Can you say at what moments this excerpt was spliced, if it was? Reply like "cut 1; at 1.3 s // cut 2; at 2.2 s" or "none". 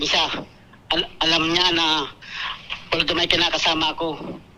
none